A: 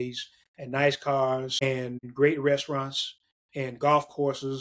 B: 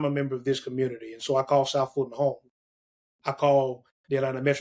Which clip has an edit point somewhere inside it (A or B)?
A